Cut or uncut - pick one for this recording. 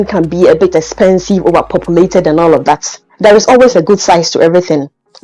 uncut